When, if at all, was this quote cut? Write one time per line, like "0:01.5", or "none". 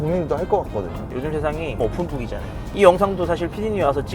0:01.0